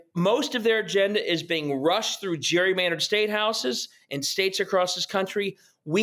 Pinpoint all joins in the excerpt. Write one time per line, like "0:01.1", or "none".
none